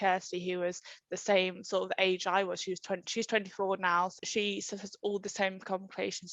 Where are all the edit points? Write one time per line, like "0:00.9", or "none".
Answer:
0:04.1